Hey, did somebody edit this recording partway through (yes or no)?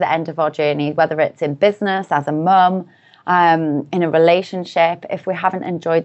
no